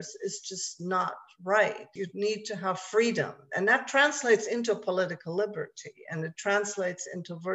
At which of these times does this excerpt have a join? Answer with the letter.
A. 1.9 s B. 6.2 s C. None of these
A